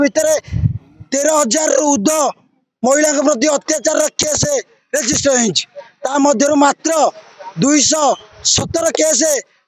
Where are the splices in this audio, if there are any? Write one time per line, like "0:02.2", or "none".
none